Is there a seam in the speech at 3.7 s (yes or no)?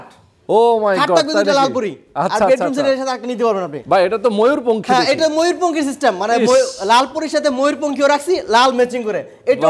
yes